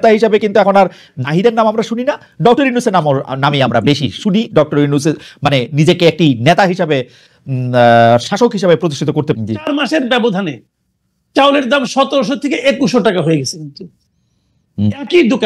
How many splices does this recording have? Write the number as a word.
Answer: one